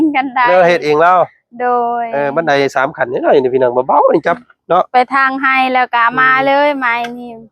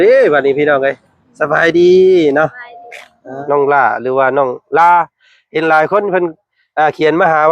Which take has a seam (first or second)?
second